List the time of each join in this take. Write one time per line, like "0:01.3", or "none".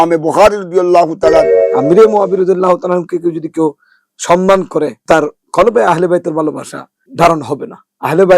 0:01.7
0:05.0
0:07.0